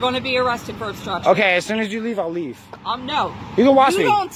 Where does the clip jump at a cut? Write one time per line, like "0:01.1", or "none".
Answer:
none